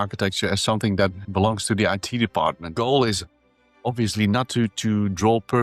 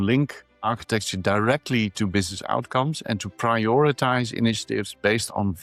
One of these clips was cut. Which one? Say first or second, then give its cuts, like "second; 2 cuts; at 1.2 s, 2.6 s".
first; 1 cut; at 2.6 s